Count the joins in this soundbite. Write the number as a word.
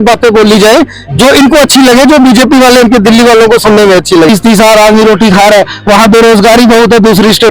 one